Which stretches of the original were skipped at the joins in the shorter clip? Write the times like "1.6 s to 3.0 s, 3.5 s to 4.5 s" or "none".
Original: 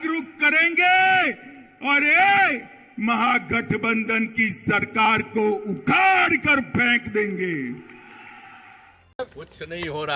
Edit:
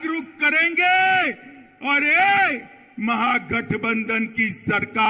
none